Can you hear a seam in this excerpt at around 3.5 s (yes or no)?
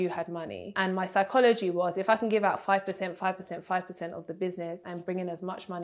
no